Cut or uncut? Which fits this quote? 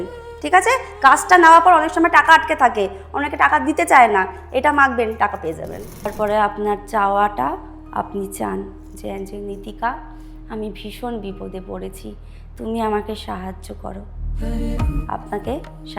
cut